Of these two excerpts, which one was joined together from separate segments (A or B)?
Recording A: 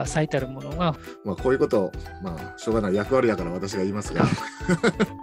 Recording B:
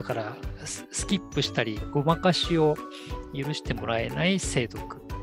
A